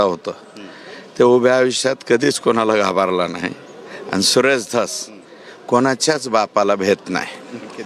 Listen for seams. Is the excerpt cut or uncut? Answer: uncut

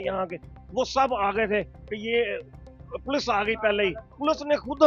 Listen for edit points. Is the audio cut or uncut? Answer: uncut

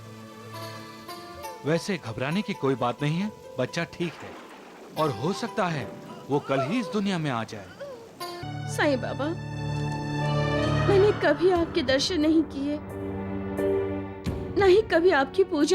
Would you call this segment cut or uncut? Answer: cut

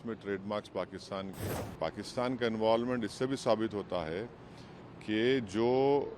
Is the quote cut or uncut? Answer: cut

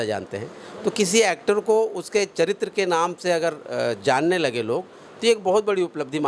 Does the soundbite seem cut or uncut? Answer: uncut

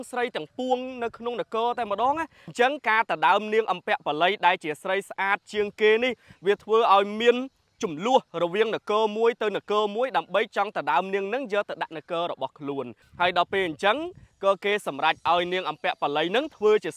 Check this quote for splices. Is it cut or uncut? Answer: cut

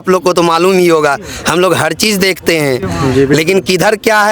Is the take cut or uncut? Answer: uncut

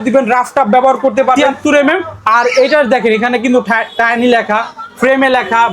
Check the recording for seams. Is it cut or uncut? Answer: cut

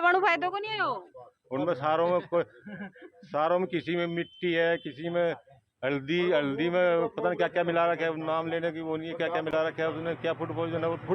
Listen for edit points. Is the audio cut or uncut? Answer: uncut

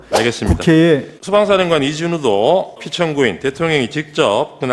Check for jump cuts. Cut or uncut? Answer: cut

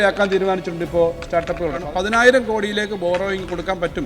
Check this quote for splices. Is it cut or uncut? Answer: cut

